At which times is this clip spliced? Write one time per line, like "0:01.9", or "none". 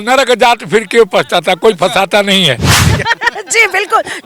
0:02.9